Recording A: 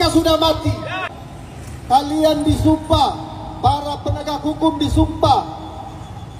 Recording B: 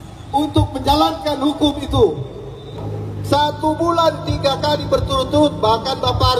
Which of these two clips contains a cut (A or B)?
B